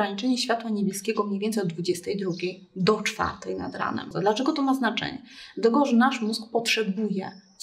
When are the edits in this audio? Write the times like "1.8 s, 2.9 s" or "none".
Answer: 4.1 s